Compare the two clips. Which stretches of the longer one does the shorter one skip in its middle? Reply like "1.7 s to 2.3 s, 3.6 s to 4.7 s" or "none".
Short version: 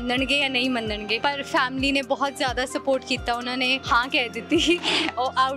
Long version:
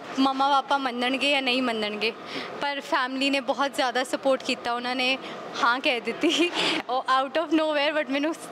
2.1 s to 2.6 s, 5.2 s to 5.5 s